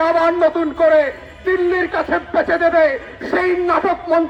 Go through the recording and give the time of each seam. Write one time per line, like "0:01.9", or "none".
none